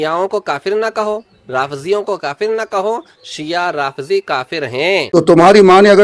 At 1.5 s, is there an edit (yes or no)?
no